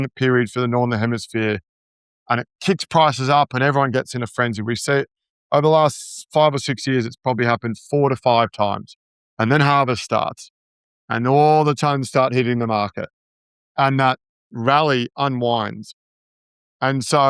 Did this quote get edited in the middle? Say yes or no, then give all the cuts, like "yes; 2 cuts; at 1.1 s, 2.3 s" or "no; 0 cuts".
yes; 1 cut; at 14.5 s